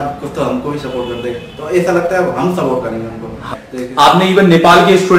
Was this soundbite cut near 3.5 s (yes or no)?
yes